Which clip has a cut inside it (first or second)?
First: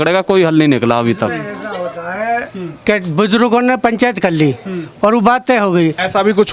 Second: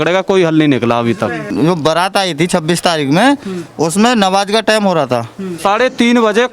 second